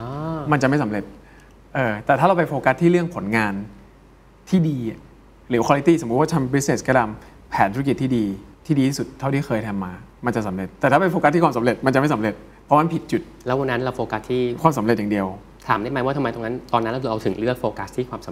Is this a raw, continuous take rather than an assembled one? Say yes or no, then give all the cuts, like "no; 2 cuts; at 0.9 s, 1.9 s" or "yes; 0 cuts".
yes; 0 cuts